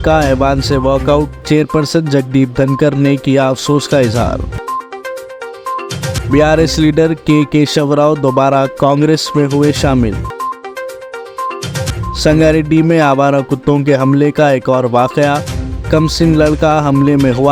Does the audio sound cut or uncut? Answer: uncut